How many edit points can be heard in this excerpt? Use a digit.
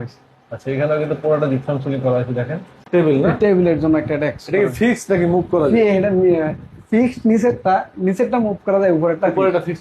1